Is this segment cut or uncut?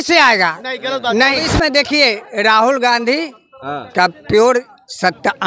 cut